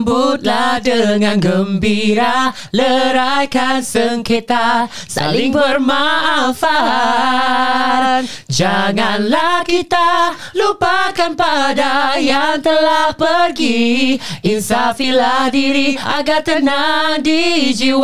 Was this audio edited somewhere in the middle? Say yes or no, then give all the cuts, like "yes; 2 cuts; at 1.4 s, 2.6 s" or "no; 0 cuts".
no; 0 cuts